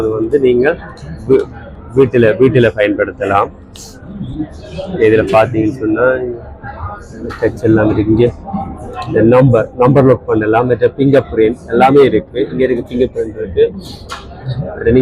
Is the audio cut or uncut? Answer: uncut